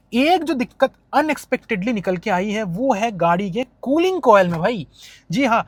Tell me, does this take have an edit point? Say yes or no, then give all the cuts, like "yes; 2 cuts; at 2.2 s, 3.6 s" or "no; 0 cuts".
no; 0 cuts